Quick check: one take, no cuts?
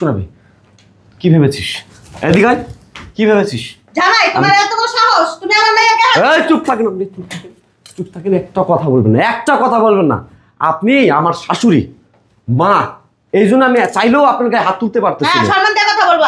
yes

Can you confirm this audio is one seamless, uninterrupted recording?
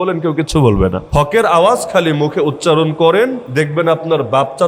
no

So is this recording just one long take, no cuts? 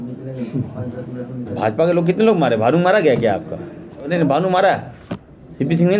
no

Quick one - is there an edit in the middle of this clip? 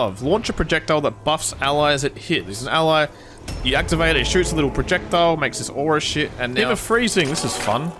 yes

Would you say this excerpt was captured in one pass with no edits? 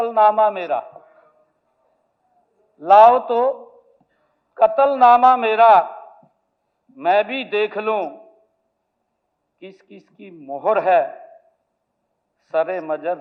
yes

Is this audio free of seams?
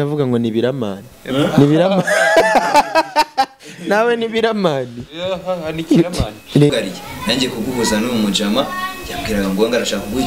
no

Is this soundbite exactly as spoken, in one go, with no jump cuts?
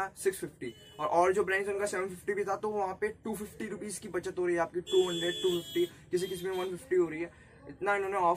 yes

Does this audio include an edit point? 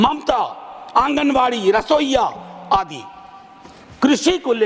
no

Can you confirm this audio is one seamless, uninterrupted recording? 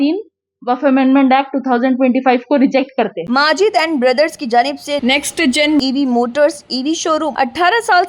no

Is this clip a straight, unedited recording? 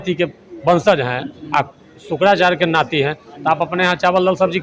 yes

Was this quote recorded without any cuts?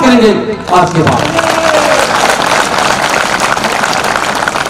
yes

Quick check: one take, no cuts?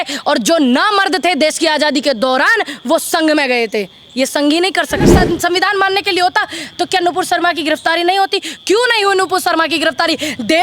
no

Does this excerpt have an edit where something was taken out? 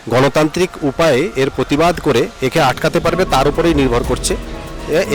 no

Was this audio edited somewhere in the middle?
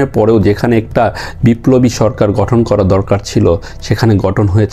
no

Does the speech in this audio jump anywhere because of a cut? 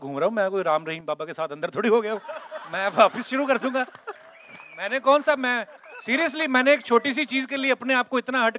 no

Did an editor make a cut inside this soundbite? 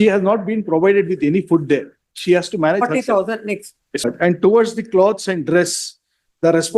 yes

